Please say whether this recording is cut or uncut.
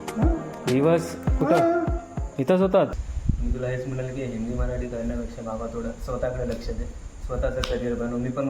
cut